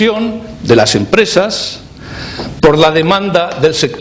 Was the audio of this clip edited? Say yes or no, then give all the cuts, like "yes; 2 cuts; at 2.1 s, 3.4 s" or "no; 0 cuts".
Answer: yes; 1 cut; at 1.8 s